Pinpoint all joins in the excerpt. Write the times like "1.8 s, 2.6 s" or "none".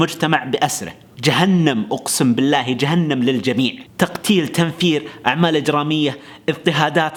none